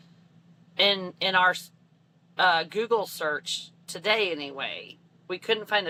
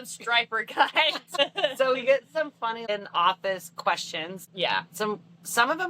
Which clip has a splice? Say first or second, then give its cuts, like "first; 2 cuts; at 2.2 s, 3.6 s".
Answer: second; 3 cuts; at 1.4 s, 2.9 s, 4.4 s